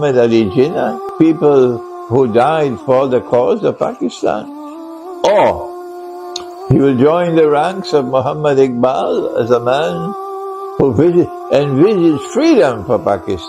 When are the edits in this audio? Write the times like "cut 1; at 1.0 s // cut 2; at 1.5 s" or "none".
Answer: cut 1; at 1.0 s